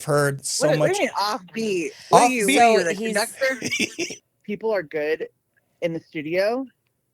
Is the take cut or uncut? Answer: cut